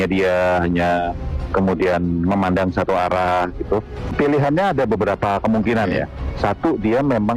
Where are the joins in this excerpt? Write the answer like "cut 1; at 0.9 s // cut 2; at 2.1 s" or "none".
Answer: cut 1; at 4.1 s